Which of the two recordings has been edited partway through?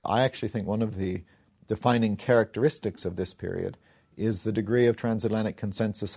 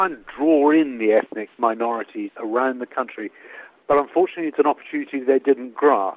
second; 1 cut; at 1.5 s

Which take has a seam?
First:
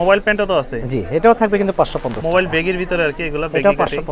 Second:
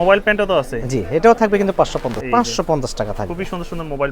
second; 1 cut; at 2.2 s

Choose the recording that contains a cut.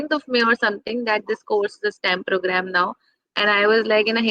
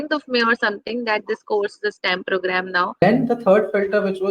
second; 1 cut; at 3.0 s

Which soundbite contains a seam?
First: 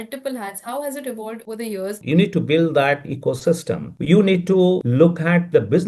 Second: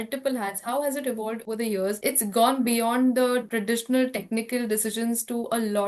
first; 1 cut; at 2.0 s

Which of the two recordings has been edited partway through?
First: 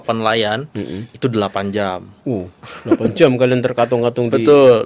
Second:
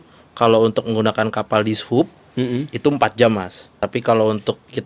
second; 1 cut; at 3.8 s

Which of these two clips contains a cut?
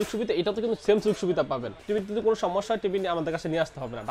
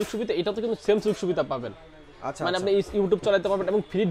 first; 1 cut; at 1.8 s

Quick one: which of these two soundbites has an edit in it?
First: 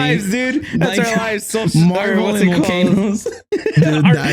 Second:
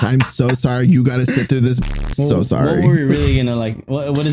second; 1 cut; at 1.8 s

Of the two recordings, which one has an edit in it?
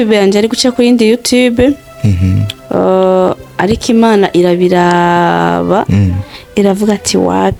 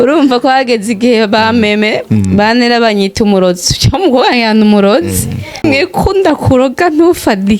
second; 1 cut; at 5.6 s

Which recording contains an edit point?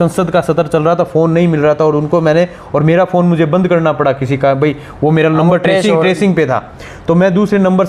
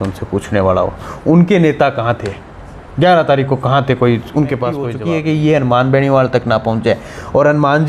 second; 1 cut; at 5.0 s

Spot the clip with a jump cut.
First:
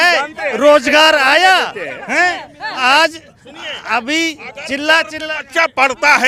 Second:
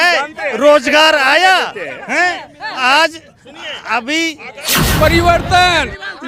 second; 1 cut; at 4.7 s

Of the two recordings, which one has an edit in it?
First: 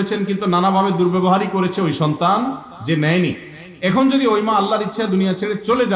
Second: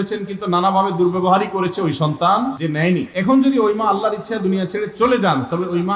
second; 1 cut; at 2.8 s

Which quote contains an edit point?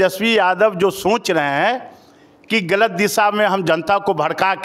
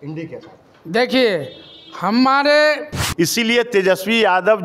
second; 1 cut; at 3.0 s

